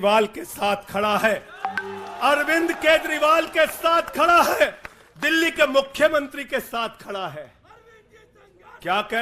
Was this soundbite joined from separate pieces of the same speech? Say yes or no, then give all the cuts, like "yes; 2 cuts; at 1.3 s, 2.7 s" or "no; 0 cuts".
no; 0 cuts